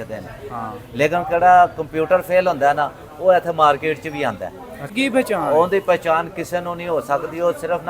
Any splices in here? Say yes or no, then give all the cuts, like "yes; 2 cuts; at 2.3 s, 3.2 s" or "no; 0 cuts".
yes; 1 cut; at 4.9 s